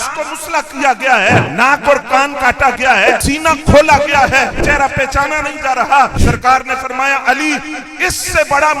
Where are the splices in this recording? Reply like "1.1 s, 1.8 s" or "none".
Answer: 1.5 s, 3.2 s, 4.6 s, 6.2 s

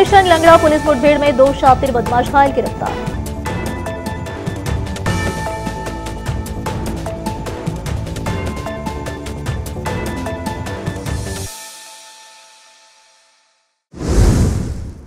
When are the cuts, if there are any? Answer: 13.9 s

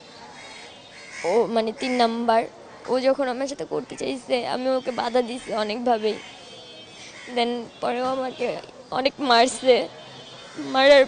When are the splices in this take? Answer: none

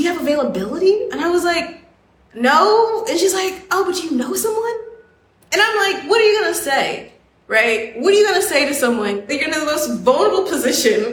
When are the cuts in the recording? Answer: 9.3 s

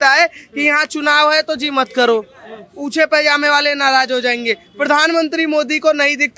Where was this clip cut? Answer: none

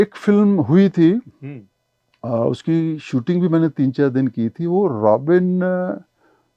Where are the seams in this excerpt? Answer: none

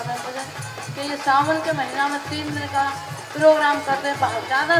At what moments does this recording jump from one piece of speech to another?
none

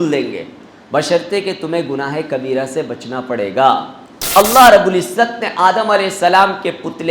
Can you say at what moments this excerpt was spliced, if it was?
4.2 s

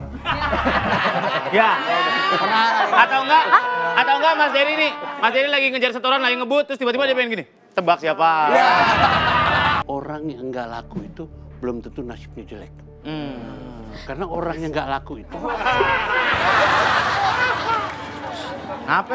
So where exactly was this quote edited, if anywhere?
9.8 s

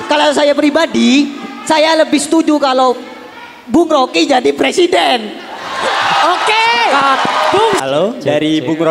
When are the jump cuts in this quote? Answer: 7.8 s

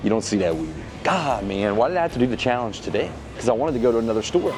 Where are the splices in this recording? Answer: none

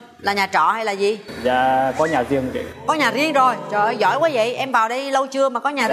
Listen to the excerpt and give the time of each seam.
none

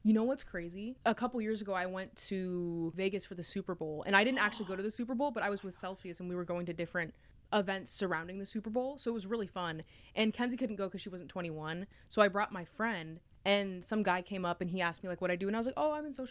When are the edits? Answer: 0.9 s

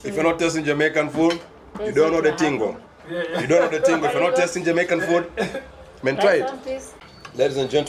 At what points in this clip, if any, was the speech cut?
6.9 s

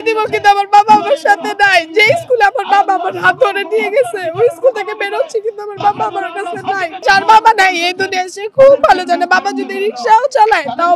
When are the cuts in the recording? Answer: 6.9 s

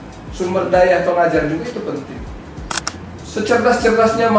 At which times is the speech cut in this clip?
2.9 s

